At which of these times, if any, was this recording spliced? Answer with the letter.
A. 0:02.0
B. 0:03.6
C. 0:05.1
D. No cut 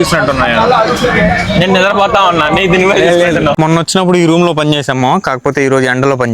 B